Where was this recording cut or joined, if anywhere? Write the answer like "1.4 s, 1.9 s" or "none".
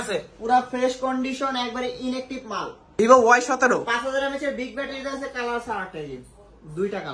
2.8 s